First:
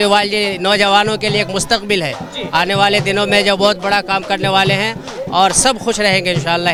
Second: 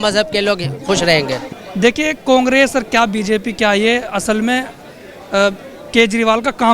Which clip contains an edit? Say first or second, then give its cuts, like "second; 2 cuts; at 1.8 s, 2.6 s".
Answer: second; 1 cut; at 1.5 s